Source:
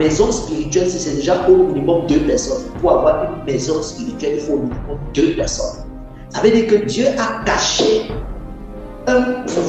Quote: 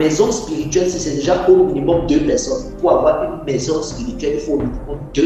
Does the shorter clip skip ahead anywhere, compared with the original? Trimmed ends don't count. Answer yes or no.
no